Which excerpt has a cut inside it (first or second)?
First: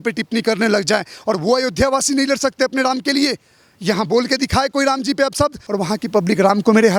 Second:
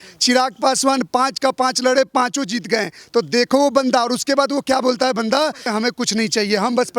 second